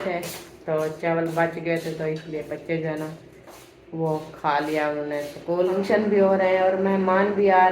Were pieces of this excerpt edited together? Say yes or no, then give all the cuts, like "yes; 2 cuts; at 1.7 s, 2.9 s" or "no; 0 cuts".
yes; 1 cut; at 5.7 s